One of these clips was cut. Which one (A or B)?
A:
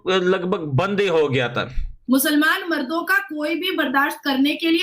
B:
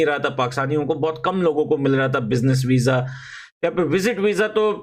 A